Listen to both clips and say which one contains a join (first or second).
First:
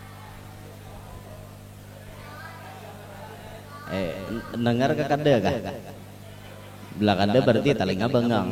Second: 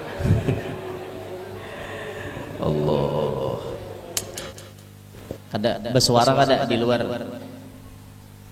second